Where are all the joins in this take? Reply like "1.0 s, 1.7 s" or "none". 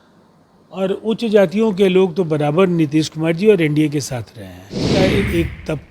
4.9 s